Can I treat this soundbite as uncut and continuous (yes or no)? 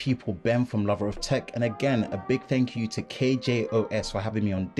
yes